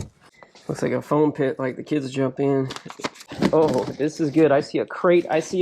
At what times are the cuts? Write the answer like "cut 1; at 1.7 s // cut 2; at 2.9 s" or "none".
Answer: cut 1; at 3.3 s

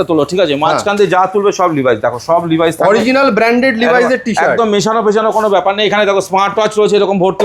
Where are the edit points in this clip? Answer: none

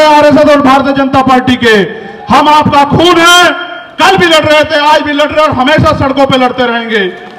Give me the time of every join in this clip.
none

